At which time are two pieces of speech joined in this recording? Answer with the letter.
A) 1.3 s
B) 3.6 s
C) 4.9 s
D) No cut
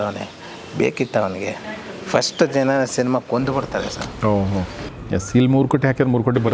C